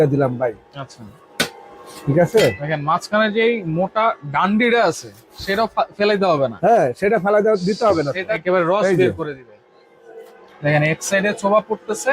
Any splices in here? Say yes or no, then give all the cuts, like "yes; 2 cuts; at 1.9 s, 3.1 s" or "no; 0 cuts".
yes; 1 cut; at 8.3 s